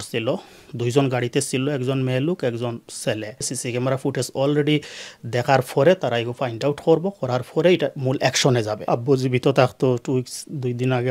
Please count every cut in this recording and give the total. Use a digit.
2